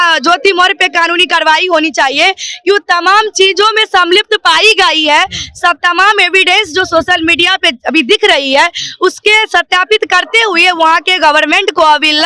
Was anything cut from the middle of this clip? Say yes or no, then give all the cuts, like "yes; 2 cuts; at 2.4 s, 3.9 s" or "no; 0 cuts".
no; 0 cuts